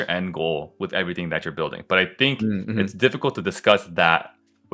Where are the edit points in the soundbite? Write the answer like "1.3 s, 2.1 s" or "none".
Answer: none